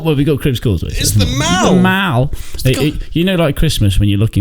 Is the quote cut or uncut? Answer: uncut